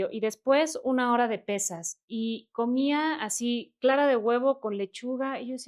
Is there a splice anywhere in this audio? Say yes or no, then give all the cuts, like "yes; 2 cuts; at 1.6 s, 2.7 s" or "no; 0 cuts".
no; 0 cuts